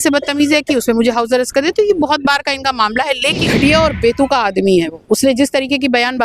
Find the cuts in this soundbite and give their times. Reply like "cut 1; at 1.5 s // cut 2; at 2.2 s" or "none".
cut 1; at 3.5 s